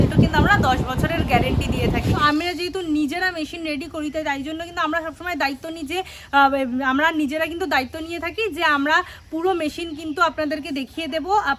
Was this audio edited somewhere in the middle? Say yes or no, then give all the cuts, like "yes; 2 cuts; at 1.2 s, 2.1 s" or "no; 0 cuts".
yes; 1 cut; at 2.2 s